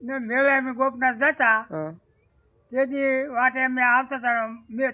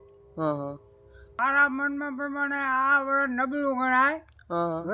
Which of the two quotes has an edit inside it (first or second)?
second